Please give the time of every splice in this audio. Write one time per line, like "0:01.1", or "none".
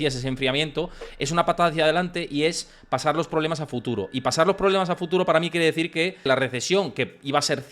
0:06.3